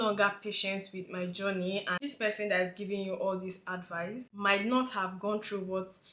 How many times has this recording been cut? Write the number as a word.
one